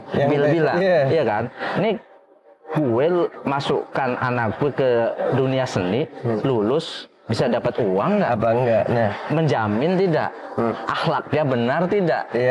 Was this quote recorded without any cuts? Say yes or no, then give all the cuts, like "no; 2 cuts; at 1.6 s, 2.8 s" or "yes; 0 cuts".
yes; 0 cuts